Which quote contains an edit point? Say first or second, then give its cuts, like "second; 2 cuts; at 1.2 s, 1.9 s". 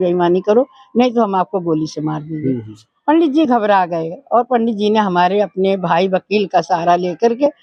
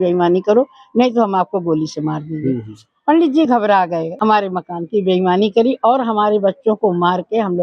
second; 1 cut; at 4.1 s